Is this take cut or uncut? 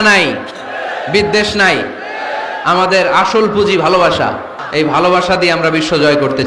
cut